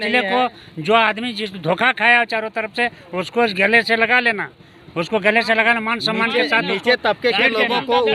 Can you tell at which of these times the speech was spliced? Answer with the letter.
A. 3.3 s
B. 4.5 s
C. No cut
C